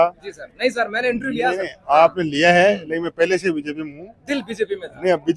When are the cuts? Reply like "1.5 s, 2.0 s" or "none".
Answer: none